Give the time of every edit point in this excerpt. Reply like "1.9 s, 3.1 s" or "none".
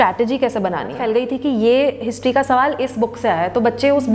1.0 s